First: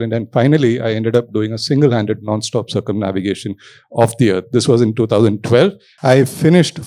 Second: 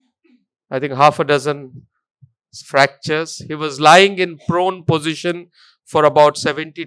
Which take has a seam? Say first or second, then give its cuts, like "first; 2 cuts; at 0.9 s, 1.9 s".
first; 1 cut; at 5.9 s